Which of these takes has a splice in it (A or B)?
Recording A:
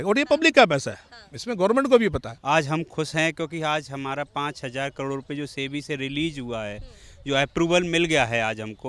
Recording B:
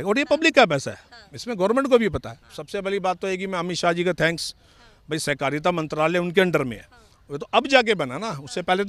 A